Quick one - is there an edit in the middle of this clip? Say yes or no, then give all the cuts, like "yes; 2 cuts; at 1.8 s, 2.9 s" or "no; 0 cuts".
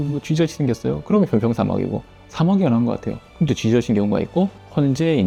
no; 0 cuts